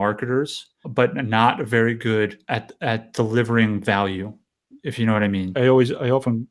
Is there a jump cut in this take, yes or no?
yes